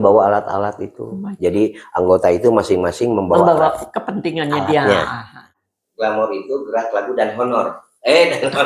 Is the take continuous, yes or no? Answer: no